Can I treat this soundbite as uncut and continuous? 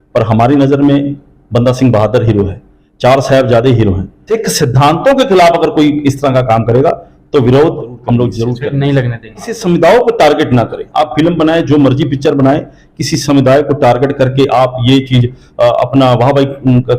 no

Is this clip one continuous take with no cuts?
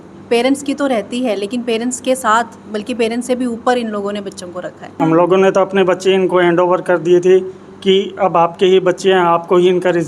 no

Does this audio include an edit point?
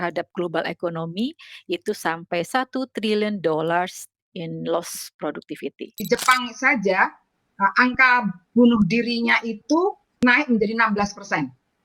yes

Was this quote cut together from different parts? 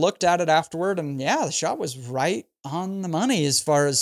no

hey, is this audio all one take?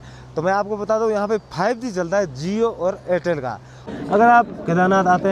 no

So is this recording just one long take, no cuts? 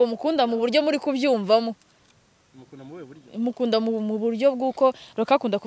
yes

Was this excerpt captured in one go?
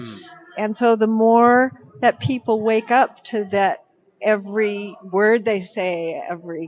yes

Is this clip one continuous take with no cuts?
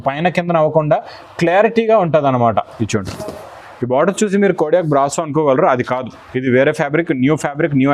no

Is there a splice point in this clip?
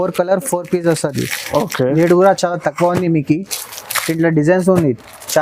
no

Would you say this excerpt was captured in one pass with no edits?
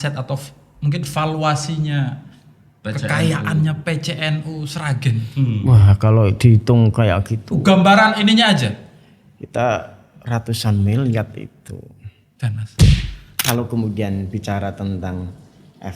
no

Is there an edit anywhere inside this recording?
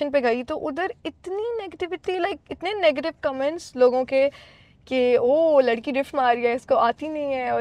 no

